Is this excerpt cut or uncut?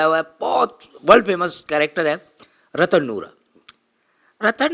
uncut